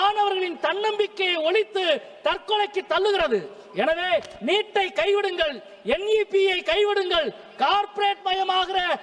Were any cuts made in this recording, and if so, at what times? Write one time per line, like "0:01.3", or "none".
none